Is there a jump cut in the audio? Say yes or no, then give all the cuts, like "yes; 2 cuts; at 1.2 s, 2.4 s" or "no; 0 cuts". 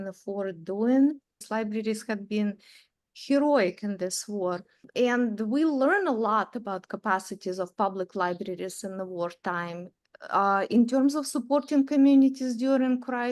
yes; 2 cuts; at 1.4 s, 4.8 s